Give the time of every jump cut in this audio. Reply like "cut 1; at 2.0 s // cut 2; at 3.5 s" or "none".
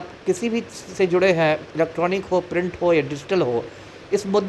none